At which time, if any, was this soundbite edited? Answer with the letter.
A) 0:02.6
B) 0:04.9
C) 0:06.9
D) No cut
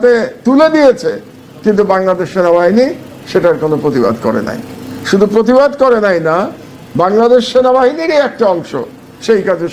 D